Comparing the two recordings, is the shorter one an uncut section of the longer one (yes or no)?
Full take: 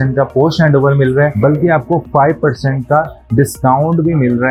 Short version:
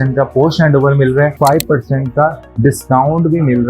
no